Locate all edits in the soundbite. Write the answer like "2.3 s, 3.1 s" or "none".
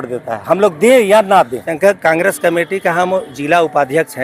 none